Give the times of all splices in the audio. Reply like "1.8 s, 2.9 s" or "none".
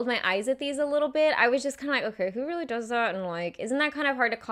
none